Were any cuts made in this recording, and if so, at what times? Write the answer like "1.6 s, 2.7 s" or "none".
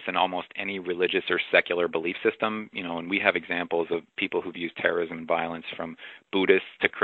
none